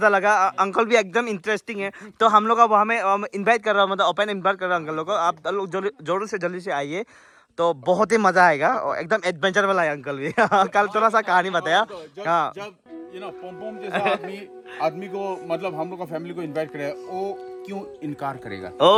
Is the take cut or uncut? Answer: uncut